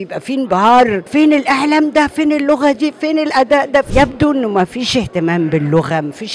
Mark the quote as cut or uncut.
cut